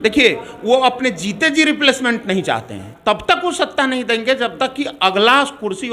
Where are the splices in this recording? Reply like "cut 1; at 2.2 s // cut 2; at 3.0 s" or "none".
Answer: cut 1; at 2.9 s